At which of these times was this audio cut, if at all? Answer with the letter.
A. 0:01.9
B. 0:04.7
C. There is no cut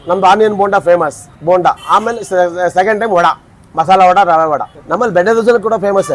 B